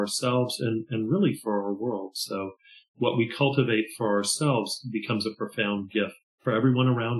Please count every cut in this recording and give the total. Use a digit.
1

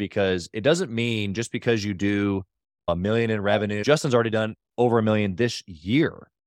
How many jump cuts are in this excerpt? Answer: 1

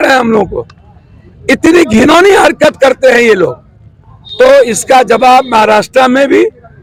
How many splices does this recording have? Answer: 0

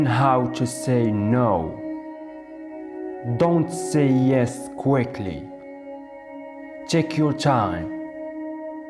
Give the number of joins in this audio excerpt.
0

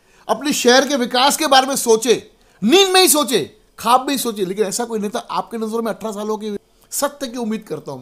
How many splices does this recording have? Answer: 1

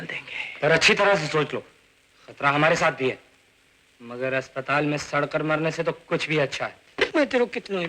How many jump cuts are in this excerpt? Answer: 1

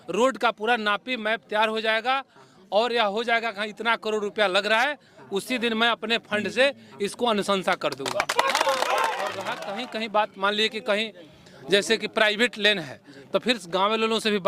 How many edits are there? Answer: 1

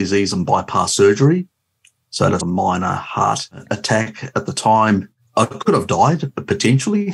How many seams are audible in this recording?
2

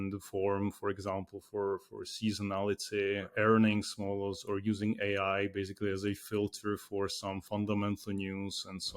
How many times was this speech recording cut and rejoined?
1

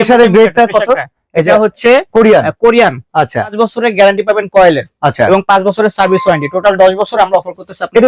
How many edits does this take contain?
1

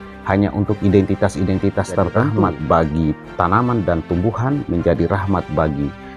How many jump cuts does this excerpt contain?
1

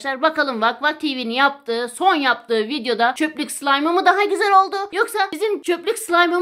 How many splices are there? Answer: 2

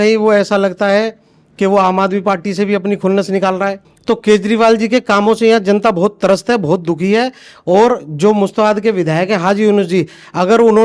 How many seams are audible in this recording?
1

